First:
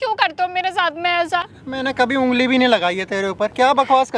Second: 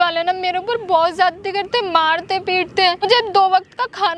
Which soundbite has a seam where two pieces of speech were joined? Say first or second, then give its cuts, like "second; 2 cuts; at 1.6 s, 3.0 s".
second; 1 cut; at 3.1 s